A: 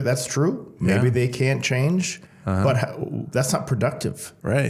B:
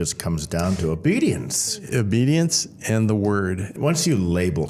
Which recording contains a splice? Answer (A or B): B